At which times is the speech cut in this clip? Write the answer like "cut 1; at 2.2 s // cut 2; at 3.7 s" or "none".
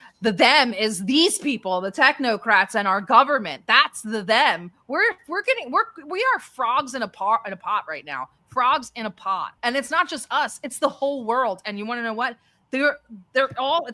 cut 1; at 9.5 s